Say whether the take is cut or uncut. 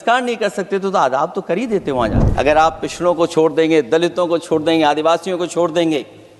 cut